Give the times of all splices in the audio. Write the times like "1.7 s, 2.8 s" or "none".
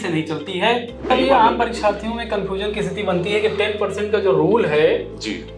1.1 s